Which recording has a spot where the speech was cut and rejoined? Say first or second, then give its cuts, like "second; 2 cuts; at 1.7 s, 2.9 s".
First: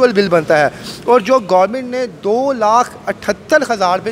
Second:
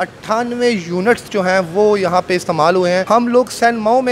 second; 1 cut; at 3.0 s